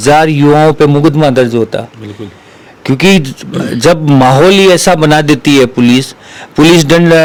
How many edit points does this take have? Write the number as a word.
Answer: zero